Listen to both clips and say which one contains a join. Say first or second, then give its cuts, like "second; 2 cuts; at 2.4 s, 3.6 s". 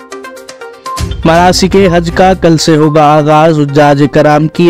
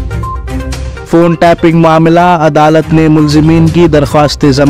second; 1 cut; at 0.9 s